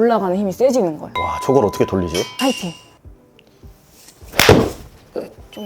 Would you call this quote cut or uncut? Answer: cut